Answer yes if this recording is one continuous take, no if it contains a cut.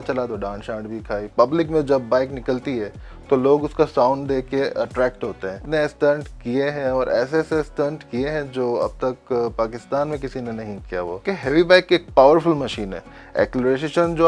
no